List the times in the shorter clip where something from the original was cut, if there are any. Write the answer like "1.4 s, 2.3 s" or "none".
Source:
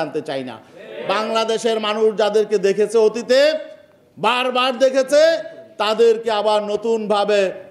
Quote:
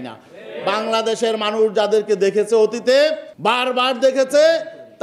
3.3 s